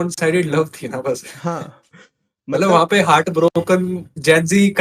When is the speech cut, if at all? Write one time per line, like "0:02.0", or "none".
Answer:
none